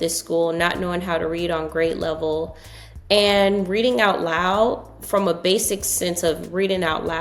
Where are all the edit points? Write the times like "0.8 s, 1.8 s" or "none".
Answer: none